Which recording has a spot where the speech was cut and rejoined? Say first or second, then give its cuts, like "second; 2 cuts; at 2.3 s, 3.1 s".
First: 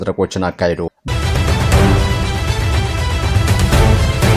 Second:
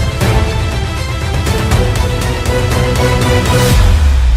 first; 1 cut; at 1.1 s